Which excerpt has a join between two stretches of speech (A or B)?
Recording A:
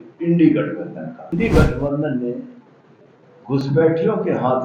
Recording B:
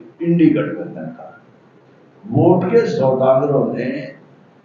A